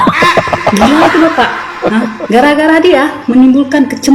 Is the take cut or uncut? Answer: uncut